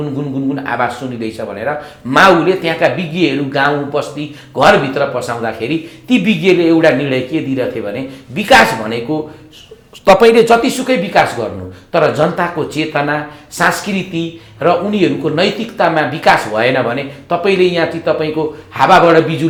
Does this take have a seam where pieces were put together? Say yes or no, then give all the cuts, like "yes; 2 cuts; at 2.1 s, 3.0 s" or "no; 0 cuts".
no; 0 cuts